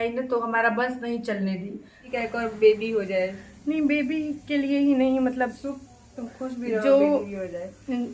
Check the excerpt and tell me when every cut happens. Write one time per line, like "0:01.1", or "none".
0:02.0